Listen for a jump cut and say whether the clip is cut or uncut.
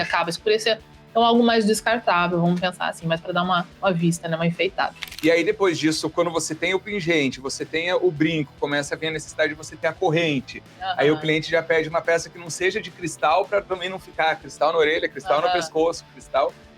cut